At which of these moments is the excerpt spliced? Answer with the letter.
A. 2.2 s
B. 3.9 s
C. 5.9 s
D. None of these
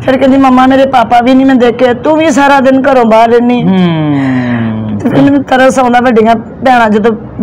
D